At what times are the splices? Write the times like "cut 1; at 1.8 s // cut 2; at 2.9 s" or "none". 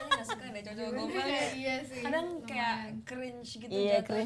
none